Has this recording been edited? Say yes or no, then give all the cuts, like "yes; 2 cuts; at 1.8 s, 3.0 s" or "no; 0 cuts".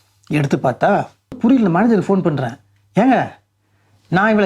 yes; 1 cut; at 1.4 s